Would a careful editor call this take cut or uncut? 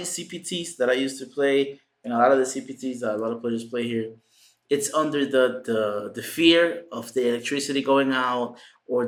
uncut